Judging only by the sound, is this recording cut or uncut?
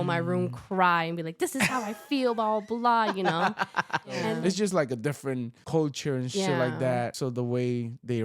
cut